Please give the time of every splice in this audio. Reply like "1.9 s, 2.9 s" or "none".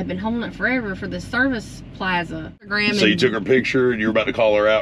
2.7 s